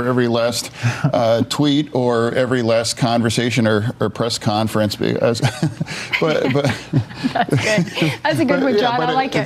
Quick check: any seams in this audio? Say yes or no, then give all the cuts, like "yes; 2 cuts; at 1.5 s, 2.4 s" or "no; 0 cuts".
no; 0 cuts